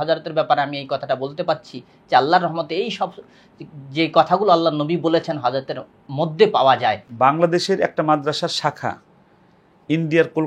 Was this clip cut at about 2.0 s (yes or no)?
no